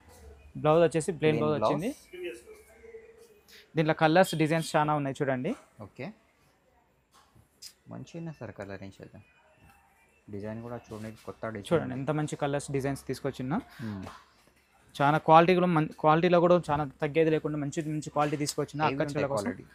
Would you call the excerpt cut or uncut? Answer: uncut